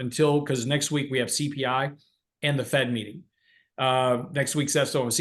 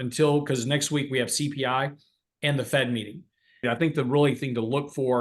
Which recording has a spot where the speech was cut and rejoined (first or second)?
second